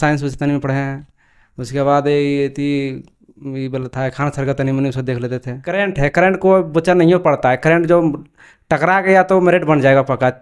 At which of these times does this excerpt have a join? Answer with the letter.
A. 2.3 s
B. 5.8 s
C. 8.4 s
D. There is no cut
B